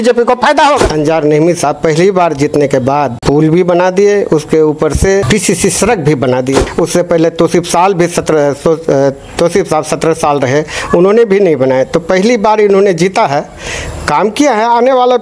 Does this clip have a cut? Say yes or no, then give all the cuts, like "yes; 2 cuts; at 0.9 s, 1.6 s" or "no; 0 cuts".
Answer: yes; 4 cuts; at 0.9 s, 3.2 s, 5.2 s, 6.6 s